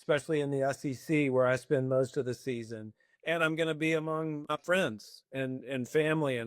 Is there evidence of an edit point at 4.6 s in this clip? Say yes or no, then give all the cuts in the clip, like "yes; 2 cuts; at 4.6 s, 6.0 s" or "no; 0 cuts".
yes; 1 cut; at 4.6 s